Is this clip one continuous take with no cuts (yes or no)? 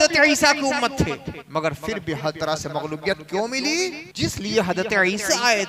no